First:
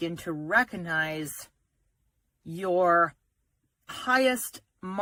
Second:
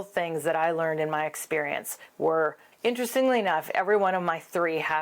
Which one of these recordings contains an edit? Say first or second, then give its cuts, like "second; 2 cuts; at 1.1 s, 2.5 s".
second; 1 cut; at 2.6 s